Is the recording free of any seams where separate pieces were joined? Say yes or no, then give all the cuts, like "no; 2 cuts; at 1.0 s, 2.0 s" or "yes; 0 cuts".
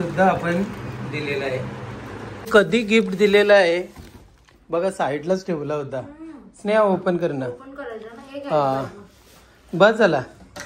no; 1 cut; at 2.5 s